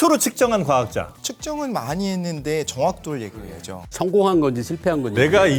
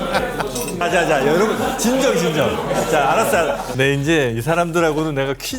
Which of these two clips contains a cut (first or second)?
second